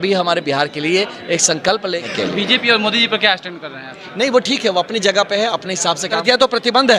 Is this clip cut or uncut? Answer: cut